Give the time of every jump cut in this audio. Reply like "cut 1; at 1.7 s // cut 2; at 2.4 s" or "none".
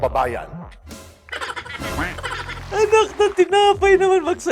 cut 1; at 2.6 s

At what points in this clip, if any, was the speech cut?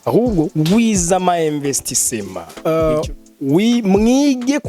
cut 1; at 2.5 s

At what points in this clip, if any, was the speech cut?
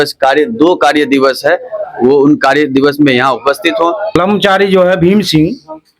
cut 1; at 4.1 s

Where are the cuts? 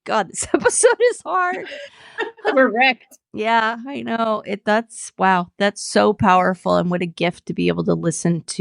cut 1; at 2.5 s

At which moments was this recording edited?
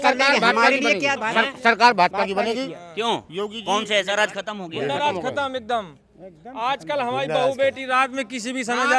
cut 1; at 4.1 s

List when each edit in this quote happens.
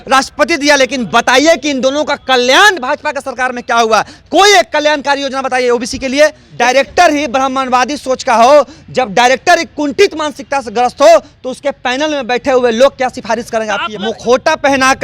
cut 1; at 6.4 s // cut 2; at 13.8 s

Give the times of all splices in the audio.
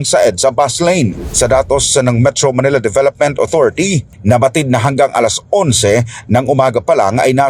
cut 1; at 1.2 s

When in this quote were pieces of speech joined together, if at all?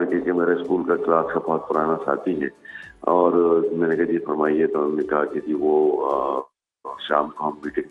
none

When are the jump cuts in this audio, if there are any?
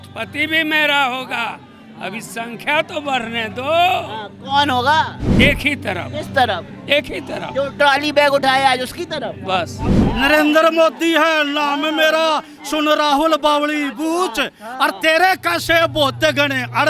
cut 1; at 5.2 s // cut 2; at 10.0 s

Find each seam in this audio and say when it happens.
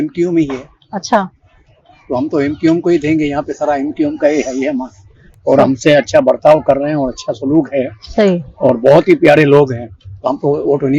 none

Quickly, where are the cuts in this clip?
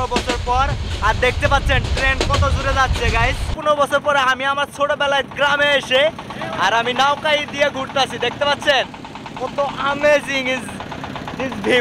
cut 1; at 3.5 s

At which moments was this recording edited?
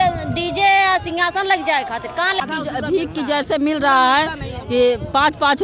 cut 1; at 2.4 s

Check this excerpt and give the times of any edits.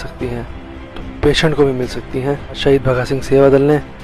cut 1; at 2.6 s

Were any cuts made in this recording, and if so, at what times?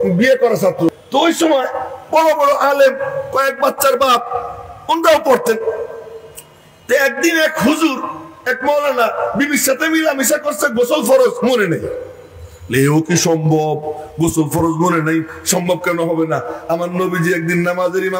cut 1; at 1.0 s

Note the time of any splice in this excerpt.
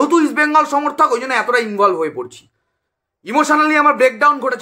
none

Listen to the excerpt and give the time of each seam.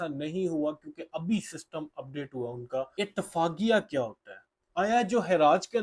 cut 1; at 3.0 s

